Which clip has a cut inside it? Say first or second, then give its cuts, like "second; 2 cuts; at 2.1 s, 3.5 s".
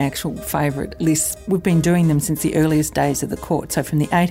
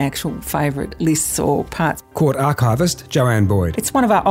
first; 1 cut; at 1.3 s